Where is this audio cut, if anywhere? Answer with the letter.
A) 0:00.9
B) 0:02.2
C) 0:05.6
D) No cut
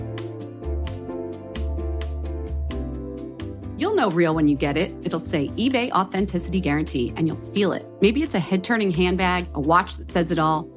B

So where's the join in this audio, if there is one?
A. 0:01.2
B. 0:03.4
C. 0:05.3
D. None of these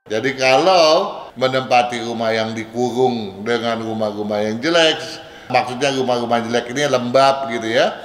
A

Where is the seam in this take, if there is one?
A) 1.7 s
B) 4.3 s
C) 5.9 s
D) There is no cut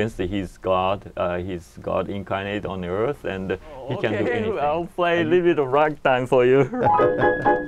B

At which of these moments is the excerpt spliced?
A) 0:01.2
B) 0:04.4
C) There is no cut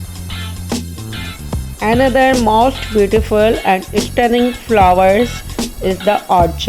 A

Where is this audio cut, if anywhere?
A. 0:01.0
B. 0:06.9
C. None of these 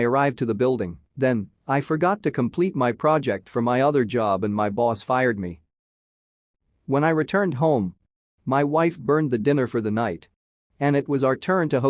A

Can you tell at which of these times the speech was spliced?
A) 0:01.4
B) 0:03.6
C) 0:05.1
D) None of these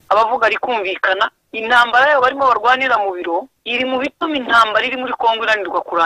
B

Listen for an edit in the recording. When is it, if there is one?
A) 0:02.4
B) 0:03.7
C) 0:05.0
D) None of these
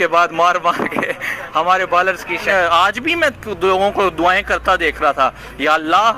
A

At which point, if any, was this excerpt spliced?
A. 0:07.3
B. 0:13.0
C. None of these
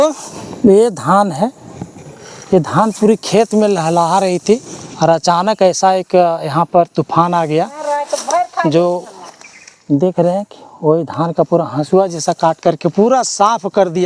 C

